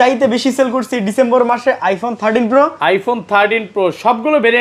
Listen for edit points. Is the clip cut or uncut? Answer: uncut